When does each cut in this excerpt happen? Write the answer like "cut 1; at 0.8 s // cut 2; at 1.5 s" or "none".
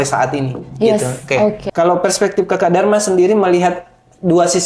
cut 1; at 1.6 s